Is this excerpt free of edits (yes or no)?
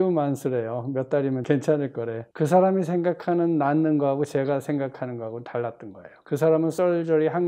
yes